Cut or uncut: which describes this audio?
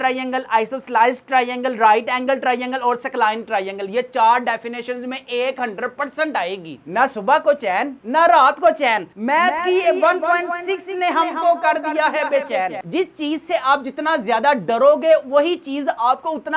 cut